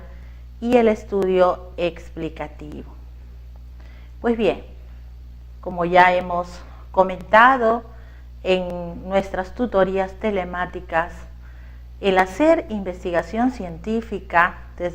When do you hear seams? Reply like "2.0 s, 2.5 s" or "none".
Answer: 13.8 s